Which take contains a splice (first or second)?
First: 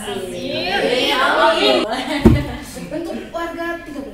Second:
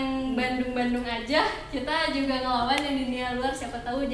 first